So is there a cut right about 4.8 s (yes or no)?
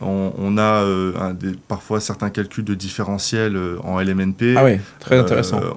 no